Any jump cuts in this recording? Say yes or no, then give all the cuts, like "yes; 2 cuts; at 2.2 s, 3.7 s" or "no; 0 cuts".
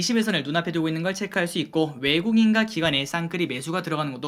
no; 0 cuts